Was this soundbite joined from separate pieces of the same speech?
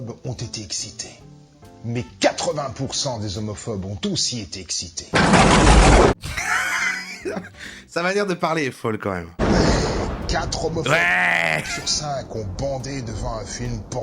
yes; 2 cuts; at 6.1 s, 9.4 s

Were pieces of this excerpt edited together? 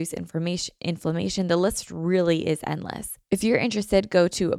yes; 1 cut; at 3.1 s

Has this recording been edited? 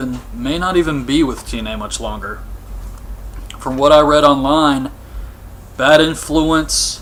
no; 0 cuts

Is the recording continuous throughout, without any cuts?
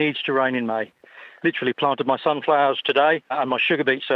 no; 2 cuts; at 1.2 s, 3.3 s

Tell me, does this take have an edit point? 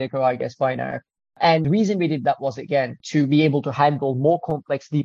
yes; 2 cuts; at 1.6 s, 3.0 s

